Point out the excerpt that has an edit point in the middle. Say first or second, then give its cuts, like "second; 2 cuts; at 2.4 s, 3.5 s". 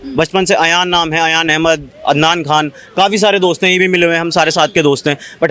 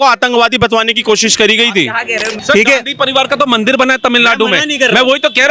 second; 1 cut; at 2.3 s